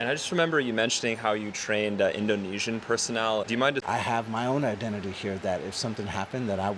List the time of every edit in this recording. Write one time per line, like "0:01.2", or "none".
0:03.8